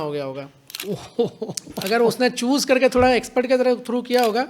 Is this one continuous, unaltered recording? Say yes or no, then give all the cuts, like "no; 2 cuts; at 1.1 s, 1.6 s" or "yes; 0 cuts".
yes; 0 cuts